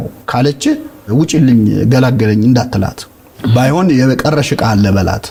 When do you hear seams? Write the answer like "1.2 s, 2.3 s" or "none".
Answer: none

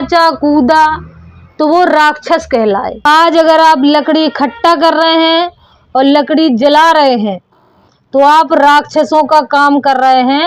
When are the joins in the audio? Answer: 2.9 s

